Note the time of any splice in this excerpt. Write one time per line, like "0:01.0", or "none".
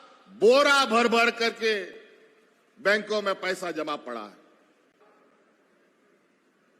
0:05.0